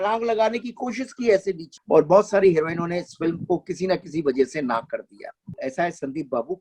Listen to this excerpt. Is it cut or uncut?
cut